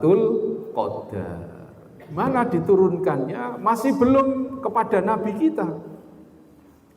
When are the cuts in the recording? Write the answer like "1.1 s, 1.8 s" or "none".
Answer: 2.2 s